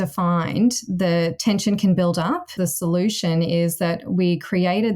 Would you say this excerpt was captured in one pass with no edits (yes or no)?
no